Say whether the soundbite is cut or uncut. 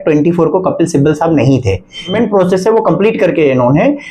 cut